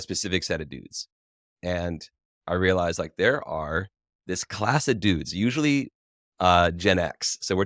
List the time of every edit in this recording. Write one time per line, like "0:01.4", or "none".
none